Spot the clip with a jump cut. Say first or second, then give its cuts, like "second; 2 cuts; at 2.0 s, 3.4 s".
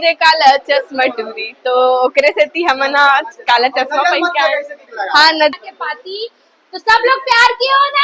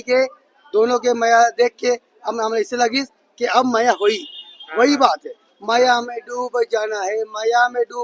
first; 1 cut; at 5.5 s